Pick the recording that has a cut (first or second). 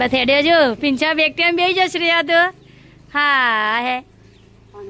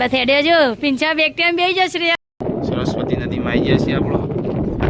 second